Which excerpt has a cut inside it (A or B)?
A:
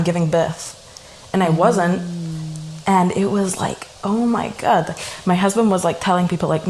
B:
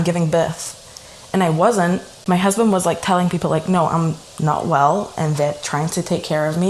B